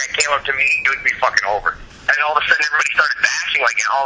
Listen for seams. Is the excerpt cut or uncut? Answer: cut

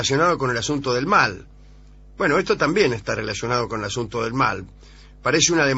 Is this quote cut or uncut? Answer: uncut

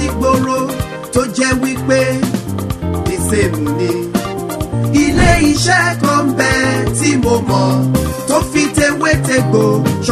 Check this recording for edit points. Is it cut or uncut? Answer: uncut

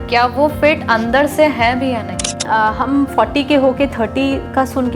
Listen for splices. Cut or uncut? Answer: cut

